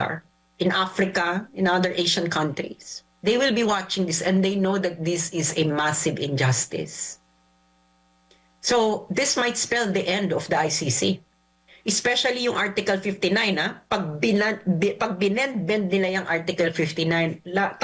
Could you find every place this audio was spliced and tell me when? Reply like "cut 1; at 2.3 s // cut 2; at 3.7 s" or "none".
none